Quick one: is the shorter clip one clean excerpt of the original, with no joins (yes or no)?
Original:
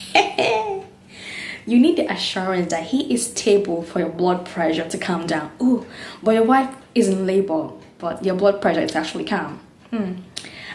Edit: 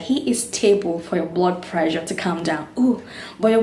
yes